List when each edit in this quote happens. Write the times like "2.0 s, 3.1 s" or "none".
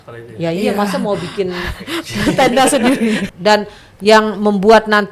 3.2 s